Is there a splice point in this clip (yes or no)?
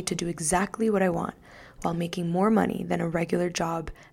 no